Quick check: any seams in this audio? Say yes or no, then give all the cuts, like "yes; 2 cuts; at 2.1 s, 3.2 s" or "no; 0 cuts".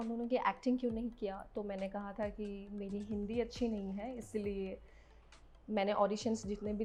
no; 0 cuts